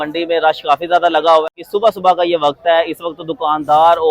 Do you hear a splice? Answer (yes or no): yes